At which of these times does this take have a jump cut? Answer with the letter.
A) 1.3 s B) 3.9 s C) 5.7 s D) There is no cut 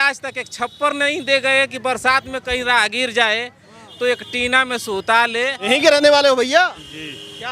C